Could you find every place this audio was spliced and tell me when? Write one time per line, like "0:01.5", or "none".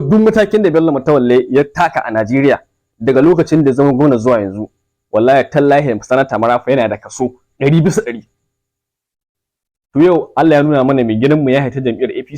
0:08.9